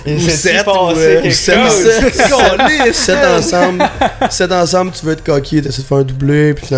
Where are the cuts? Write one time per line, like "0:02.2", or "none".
none